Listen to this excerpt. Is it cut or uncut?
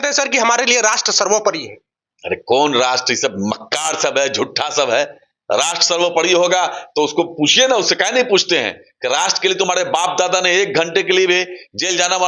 uncut